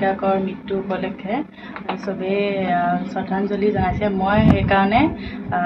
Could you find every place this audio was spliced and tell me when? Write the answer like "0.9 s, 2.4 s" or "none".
none